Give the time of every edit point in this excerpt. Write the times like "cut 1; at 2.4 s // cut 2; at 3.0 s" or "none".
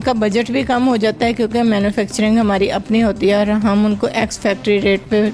none